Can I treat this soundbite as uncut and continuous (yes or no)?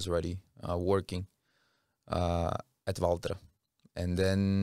yes